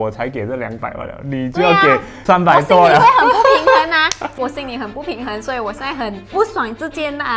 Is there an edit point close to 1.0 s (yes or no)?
no